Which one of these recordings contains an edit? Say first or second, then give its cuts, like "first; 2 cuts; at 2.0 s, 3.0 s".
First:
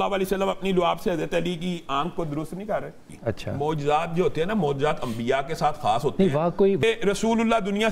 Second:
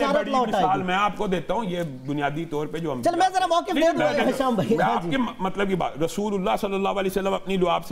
first; 2 cuts; at 3.1 s, 6.8 s